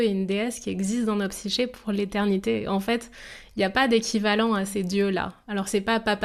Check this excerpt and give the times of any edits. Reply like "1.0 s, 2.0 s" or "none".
none